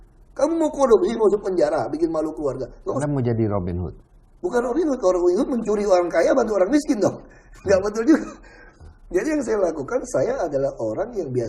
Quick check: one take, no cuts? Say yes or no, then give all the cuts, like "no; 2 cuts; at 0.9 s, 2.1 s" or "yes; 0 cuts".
no; 1 cut; at 3.0 s